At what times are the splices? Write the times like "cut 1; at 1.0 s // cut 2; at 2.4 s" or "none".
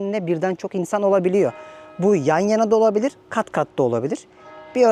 none